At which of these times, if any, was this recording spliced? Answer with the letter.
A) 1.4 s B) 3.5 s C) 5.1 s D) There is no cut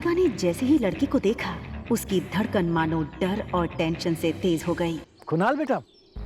C